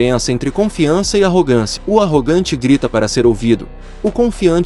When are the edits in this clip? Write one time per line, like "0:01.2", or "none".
0:01.8